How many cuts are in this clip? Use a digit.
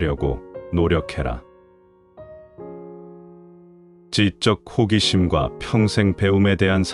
0